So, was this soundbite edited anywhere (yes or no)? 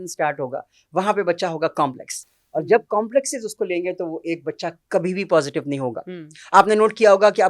no